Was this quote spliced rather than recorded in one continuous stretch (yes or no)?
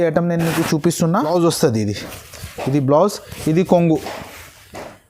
yes